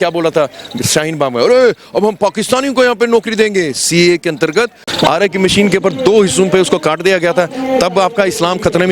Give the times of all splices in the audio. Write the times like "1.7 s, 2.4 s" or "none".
4.8 s

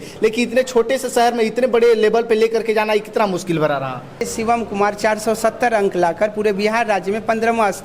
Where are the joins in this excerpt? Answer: 4.3 s

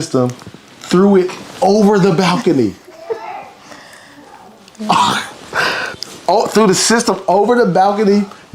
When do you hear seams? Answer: none

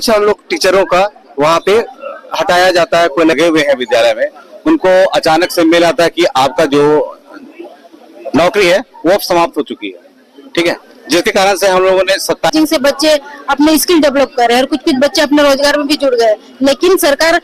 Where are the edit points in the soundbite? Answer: 3.3 s, 12.5 s

